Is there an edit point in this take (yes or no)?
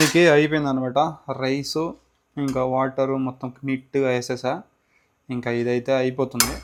no